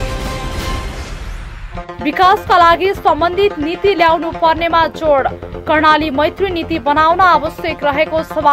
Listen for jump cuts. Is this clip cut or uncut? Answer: cut